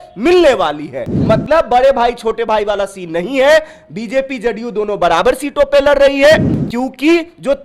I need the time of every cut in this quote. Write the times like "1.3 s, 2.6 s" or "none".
1.1 s, 6.6 s

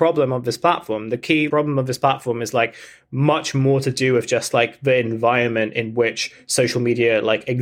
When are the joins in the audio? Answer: none

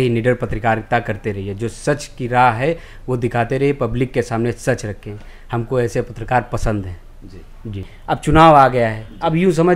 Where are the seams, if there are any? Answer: 7.9 s

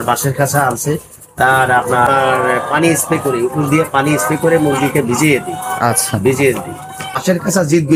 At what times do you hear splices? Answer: 2.1 s, 7.2 s

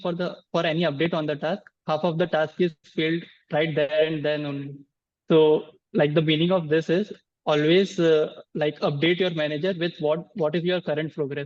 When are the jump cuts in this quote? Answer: none

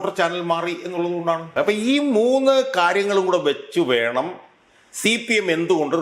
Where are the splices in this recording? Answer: 1.5 s

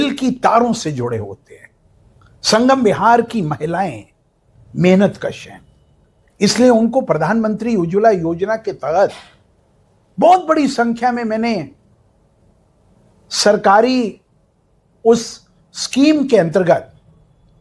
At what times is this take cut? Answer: none

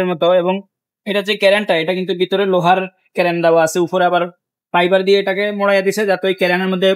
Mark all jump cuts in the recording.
none

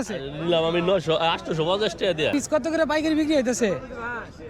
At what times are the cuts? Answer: 2.3 s

